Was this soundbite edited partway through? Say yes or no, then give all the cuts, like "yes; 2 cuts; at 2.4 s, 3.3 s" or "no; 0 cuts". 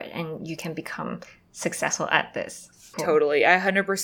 yes; 1 cut; at 2.9 s